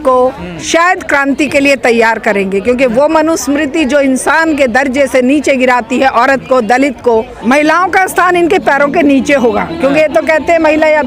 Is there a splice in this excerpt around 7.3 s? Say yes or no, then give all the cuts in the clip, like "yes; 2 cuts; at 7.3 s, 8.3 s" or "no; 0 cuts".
yes; 1 cut; at 7.3 s